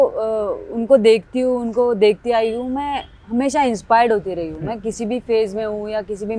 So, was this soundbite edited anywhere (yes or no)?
no